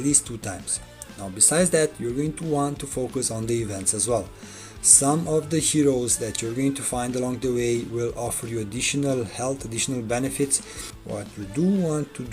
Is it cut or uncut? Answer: cut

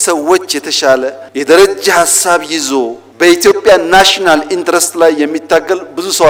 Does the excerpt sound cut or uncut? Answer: uncut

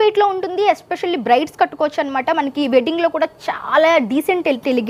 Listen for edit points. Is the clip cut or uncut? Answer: uncut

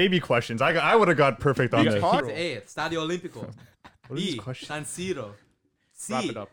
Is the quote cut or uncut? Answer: cut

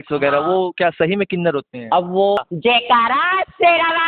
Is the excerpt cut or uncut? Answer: cut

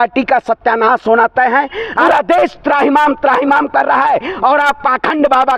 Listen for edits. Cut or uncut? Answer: cut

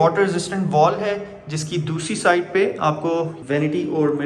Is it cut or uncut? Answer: cut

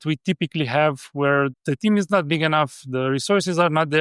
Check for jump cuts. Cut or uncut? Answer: cut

